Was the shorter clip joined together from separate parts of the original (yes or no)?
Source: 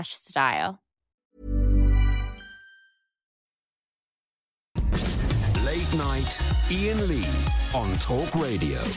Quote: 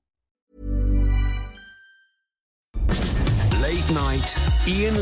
yes